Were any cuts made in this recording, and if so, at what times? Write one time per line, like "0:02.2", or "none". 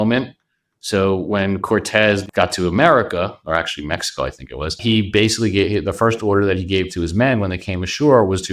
0:02.2
0:04.8